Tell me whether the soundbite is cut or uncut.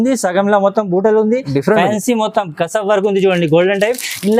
uncut